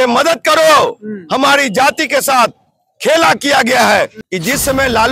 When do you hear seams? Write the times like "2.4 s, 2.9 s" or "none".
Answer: 4.2 s